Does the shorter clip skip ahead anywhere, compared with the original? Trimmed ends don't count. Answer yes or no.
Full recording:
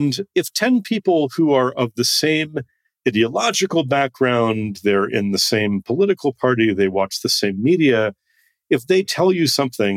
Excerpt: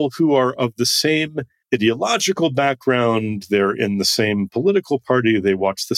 yes